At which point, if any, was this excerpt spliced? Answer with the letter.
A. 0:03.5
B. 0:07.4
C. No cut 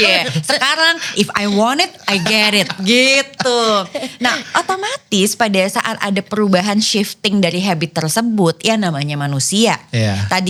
C